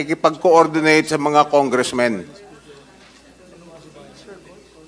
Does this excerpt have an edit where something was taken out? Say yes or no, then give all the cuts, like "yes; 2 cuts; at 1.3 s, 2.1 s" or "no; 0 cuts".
no; 0 cuts